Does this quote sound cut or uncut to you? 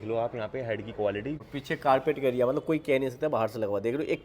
cut